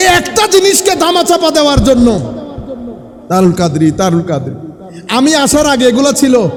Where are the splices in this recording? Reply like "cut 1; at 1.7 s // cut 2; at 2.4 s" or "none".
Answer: none